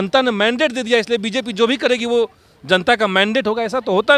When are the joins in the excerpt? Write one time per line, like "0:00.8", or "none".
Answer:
none